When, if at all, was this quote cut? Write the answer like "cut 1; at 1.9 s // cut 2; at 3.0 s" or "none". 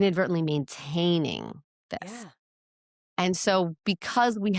none